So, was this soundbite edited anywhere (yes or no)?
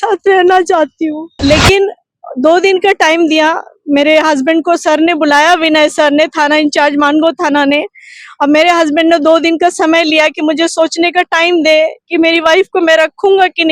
yes